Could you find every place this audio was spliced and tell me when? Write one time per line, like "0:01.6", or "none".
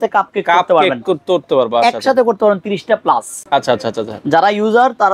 none